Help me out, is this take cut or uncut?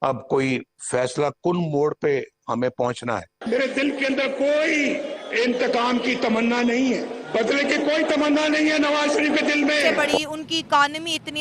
cut